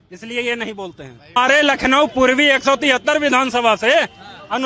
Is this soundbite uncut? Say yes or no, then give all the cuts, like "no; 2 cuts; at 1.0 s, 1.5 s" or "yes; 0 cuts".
no; 1 cut; at 1.4 s